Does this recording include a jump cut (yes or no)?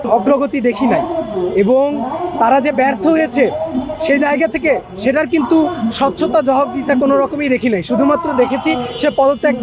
no